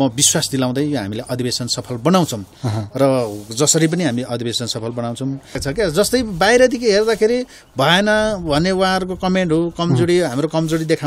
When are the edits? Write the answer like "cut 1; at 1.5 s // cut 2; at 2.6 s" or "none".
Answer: cut 1; at 5.6 s